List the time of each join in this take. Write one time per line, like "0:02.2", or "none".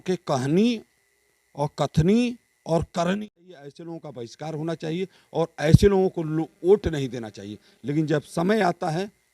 0:03.8